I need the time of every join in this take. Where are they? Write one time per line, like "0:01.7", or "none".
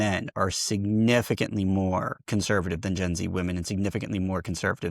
0:02.2